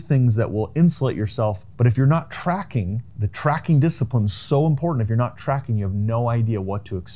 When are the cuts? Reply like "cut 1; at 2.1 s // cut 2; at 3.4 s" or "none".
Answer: none